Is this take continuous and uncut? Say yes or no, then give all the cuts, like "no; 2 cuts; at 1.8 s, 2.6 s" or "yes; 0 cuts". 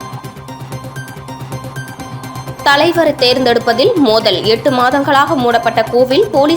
no; 1 cut; at 1.1 s